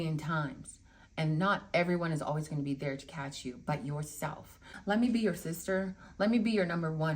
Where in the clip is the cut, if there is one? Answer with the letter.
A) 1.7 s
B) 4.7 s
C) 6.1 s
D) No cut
B